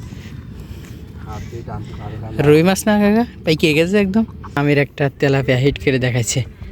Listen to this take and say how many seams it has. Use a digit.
1